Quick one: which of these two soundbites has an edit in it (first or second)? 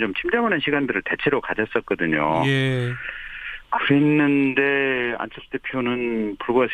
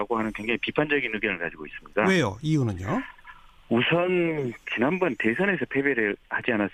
first